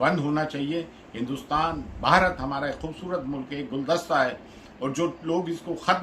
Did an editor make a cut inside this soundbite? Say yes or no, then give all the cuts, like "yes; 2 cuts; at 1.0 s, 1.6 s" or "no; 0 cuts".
no; 0 cuts